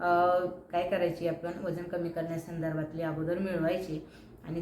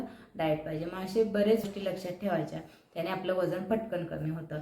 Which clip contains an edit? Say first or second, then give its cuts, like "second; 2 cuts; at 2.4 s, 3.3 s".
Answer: second; 1 cut; at 1.6 s